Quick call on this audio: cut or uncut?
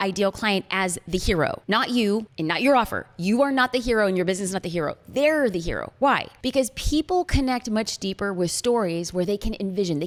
uncut